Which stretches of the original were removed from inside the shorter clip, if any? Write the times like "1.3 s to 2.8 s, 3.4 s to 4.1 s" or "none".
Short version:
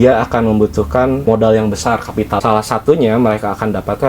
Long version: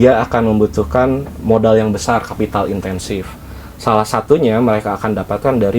1.2 s to 1.4 s, 2.6 s to 3.8 s